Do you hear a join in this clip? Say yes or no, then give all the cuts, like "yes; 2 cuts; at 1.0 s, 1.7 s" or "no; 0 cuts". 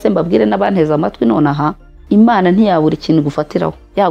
yes; 1 cut; at 1.9 s